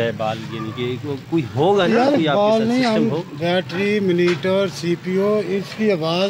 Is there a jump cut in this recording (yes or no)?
no